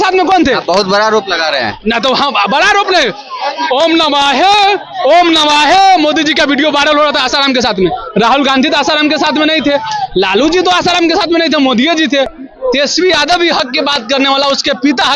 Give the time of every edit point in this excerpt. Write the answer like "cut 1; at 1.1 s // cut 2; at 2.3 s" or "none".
cut 1; at 12.4 s